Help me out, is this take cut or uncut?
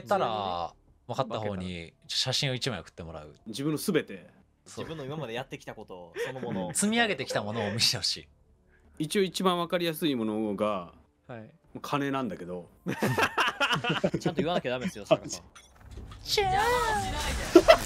cut